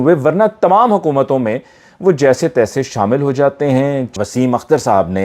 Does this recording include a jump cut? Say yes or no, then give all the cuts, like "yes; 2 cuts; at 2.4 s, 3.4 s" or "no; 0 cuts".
yes; 1 cut; at 4.1 s